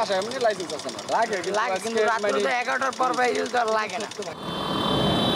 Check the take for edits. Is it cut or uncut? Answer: cut